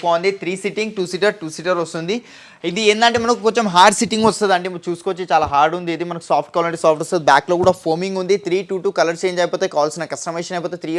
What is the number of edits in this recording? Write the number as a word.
zero